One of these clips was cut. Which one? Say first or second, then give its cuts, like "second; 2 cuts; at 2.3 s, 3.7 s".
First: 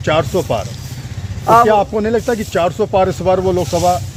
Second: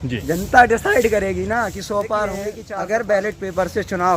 second; 1 cut; at 2.6 s